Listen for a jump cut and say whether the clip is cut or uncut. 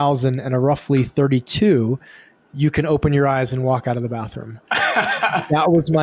uncut